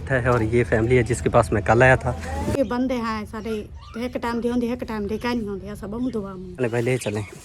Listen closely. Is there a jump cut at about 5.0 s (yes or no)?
no